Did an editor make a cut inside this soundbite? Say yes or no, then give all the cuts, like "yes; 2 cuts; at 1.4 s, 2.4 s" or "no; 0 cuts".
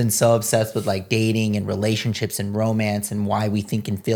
no; 0 cuts